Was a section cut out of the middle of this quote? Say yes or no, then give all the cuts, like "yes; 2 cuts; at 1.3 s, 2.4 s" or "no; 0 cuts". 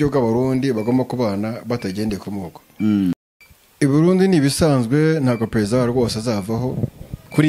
yes; 1 cut; at 3.1 s